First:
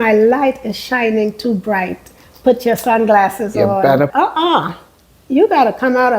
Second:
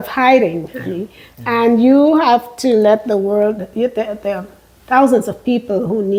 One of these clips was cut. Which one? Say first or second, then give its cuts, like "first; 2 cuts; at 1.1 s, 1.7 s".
first; 1 cut; at 4.1 s